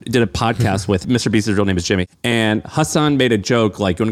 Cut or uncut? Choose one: cut